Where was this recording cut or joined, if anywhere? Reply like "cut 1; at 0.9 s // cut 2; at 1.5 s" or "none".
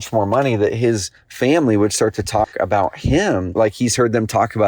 cut 1; at 3.5 s